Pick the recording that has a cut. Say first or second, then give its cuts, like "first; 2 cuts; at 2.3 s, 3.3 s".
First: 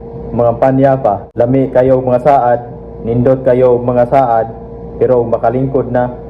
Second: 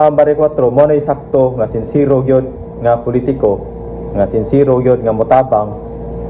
first; 1 cut; at 1.2 s